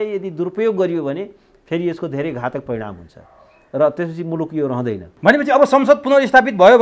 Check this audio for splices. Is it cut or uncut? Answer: cut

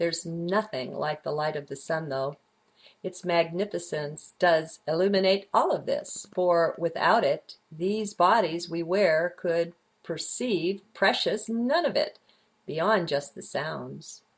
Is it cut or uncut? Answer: uncut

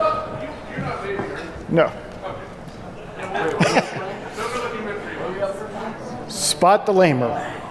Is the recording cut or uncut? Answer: cut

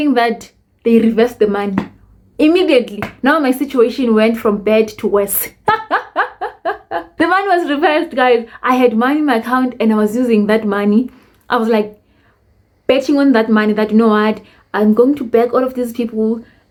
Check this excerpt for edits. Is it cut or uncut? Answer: uncut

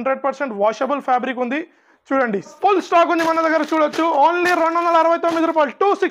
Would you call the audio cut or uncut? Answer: cut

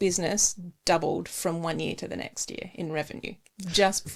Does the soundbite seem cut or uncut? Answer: uncut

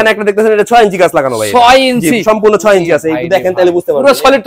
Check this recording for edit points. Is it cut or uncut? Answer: uncut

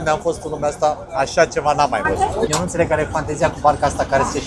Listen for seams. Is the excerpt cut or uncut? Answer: cut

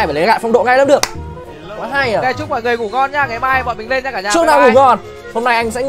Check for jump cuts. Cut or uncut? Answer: uncut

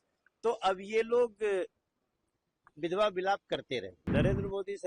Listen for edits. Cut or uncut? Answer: cut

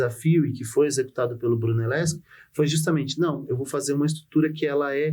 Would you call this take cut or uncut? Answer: uncut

